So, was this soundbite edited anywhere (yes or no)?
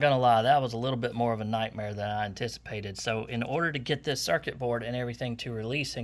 no